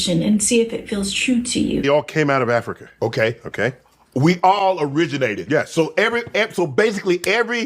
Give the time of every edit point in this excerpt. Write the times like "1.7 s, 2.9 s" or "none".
1.8 s